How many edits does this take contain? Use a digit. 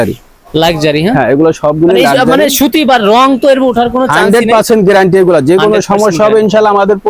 0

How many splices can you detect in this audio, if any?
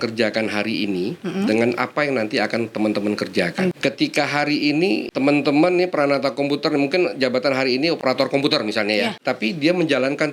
4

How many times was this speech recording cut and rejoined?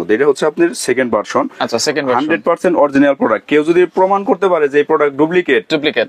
0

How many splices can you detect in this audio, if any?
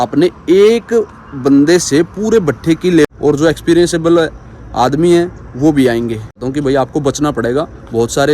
2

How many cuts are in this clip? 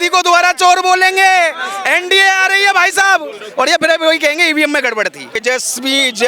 1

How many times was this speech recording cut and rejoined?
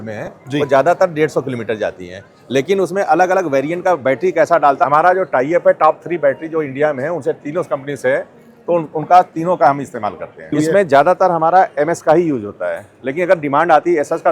2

